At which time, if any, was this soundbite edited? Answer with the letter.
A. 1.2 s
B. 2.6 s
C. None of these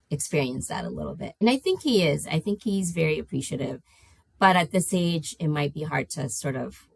A